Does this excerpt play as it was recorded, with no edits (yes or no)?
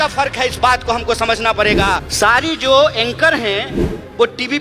no